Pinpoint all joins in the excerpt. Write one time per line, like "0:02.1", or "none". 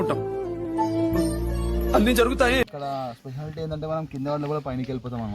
0:02.6